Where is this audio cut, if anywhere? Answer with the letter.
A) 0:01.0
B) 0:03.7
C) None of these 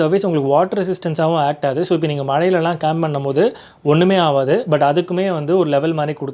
C